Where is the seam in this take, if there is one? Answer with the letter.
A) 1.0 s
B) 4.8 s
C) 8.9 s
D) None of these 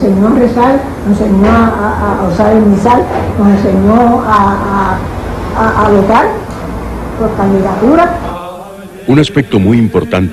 C